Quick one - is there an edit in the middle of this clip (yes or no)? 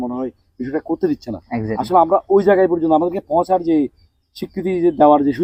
no